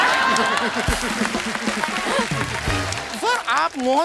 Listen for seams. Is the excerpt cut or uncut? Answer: cut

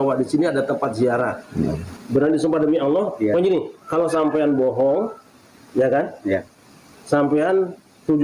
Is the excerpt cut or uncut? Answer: cut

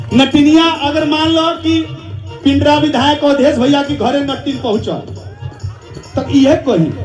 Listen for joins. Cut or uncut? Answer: uncut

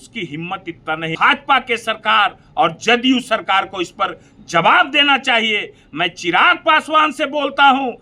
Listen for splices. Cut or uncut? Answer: cut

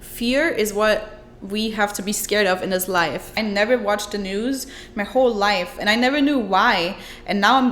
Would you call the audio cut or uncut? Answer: cut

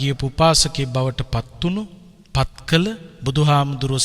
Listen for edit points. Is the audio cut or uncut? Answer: uncut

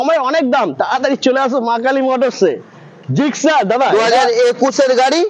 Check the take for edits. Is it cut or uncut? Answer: uncut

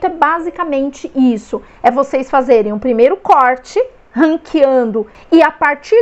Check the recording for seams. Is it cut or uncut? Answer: cut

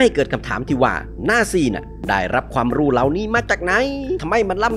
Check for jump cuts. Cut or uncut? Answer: uncut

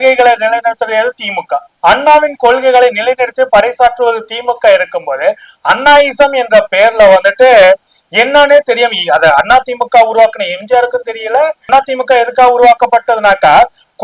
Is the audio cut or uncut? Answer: cut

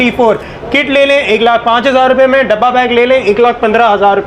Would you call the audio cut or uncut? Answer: uncut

